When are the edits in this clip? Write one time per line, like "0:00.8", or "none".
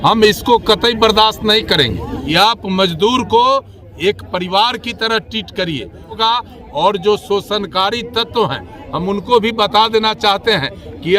0:02.2
0:06.2